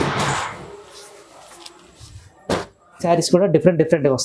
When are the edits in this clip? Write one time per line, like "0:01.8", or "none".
0:03.0